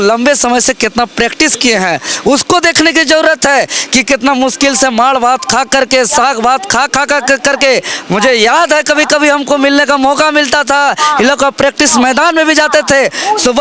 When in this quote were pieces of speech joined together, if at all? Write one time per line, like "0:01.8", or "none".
none